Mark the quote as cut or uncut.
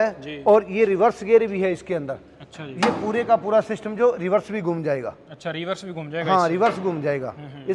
uncut